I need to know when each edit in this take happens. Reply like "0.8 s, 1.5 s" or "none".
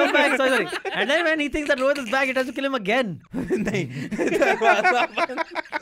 3.2 s